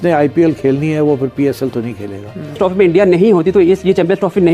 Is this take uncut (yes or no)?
no